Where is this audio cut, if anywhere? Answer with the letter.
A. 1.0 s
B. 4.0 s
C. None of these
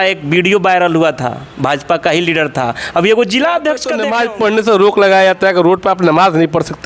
B